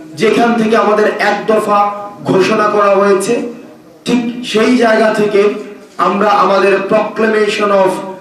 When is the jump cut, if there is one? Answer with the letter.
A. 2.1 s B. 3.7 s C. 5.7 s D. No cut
D